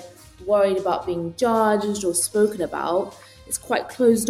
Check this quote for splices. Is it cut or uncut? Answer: cut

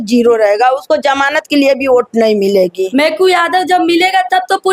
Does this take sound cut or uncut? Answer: cut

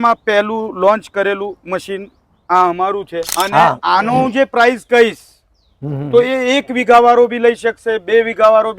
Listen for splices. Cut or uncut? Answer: cut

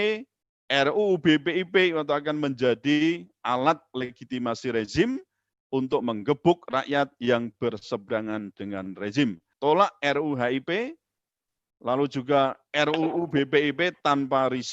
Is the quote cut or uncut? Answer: cut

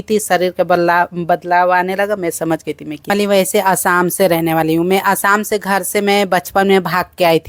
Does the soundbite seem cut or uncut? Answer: cut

